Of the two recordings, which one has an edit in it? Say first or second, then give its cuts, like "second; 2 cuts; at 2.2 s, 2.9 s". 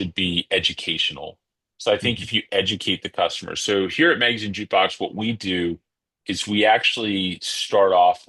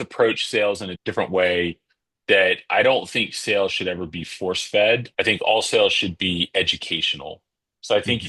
second; 2 cuts; at 0.9 s, 5.1 s